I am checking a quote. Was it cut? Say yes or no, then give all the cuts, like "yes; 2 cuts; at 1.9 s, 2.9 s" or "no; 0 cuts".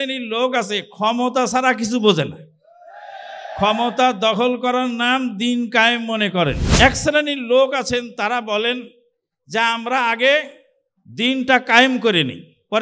yes; 1 cut; at 6.6 s